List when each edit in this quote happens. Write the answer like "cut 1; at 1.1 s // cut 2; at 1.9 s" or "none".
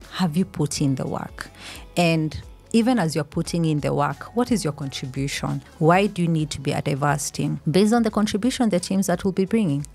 cut 1; at 5.6 s